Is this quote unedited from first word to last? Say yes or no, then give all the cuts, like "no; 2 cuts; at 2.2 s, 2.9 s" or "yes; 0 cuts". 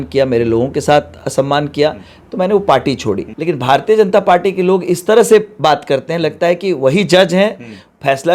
no; 1 cut; at 3.3 s